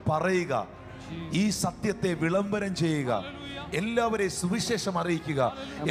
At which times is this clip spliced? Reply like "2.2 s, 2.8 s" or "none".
none